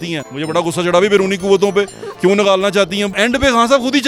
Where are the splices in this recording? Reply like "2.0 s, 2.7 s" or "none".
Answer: 3.1 s